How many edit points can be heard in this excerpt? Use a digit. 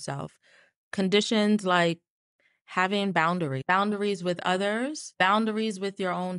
2